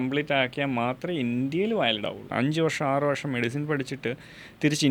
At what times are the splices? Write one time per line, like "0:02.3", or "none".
0:02.3